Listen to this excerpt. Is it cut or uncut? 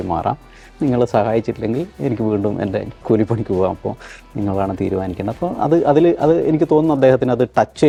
uncut